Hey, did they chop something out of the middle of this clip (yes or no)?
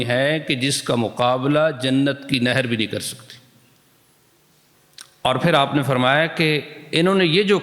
yes